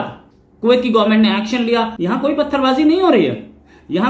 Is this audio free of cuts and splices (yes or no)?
no